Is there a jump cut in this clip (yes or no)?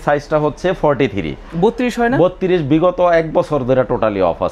no